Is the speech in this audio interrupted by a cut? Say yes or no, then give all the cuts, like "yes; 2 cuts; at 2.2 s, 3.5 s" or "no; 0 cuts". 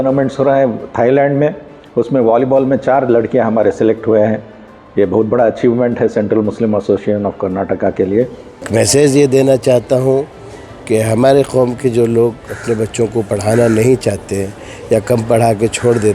yes; 1 cut; at 8.7 s